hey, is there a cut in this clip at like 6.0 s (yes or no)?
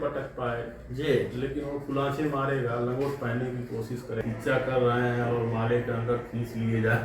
no